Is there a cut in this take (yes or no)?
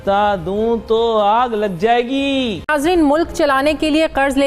yes